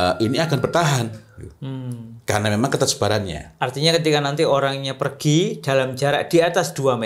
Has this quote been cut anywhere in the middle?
no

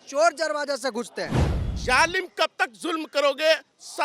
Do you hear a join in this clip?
yes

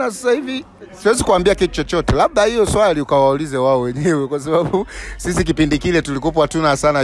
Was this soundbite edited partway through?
no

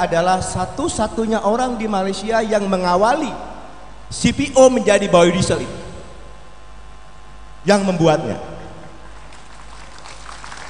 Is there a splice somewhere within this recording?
no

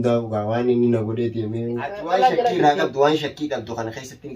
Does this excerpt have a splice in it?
yes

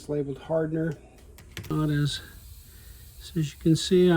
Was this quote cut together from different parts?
yes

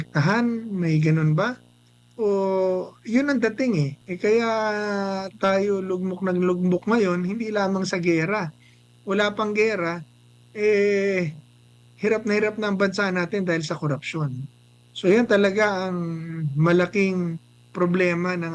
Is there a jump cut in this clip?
yes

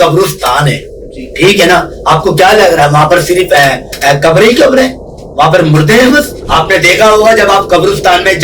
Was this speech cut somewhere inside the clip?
yes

